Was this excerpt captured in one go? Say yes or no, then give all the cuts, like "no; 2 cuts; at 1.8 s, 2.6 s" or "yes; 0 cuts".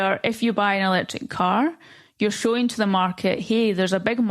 yes; 0 cuts